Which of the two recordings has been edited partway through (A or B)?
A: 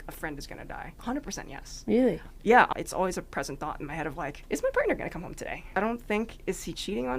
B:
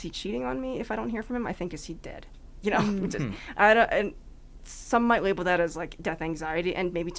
A